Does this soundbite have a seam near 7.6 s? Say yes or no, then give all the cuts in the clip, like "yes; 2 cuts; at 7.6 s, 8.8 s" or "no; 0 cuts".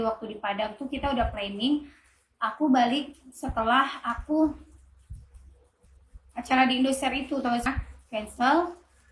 yes; 1 cut; at 7.6 s